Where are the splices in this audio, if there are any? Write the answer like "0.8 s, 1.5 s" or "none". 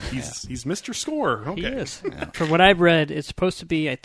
2.3 s